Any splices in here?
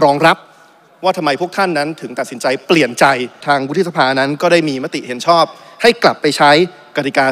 yes; 1 cut; at 3.4 s

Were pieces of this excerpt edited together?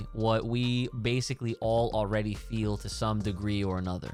no; 0 cuts

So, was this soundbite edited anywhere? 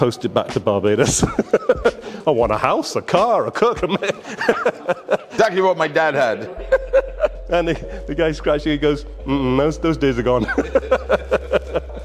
no; 0 cuts

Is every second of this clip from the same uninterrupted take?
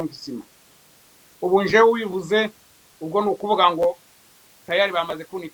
yes; 0 cuts

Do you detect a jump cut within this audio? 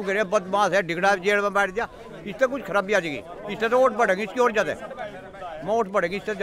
no; 0 cuts

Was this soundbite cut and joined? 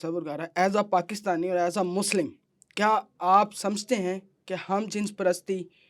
no; 0 cuts

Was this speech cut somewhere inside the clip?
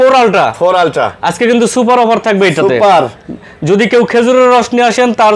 no; 0 cuts

